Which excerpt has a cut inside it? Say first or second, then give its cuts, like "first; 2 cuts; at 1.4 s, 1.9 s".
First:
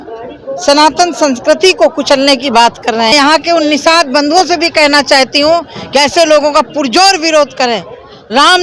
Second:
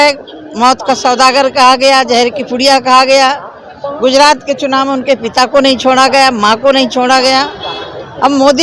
first; 1 cut; at 3.1 s